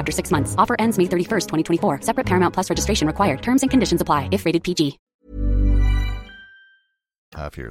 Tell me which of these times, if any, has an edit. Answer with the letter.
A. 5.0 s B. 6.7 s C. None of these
C